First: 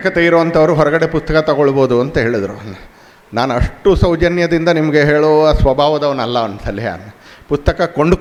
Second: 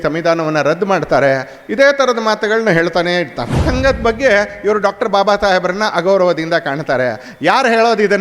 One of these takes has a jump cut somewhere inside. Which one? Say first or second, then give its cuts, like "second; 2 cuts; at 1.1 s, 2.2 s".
second; 1 cut; at 3.6 s